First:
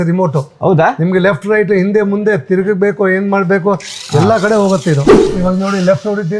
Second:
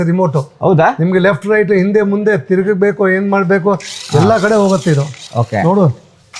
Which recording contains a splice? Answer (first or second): first